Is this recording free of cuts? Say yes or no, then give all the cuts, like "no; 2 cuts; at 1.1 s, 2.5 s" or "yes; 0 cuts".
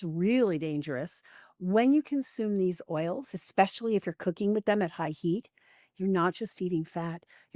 yes; 0 cuts